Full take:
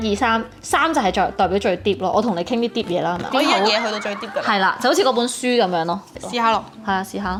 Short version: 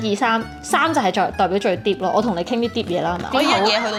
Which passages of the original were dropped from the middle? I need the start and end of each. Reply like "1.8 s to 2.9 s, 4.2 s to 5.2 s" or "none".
none